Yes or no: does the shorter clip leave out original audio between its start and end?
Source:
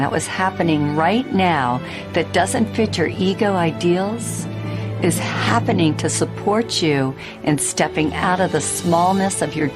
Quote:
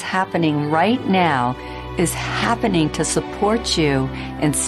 yes